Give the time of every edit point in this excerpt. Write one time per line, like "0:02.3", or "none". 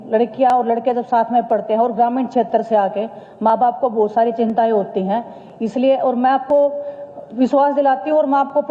none